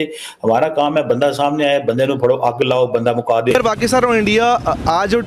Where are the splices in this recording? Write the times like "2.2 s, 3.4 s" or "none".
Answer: 3.5 s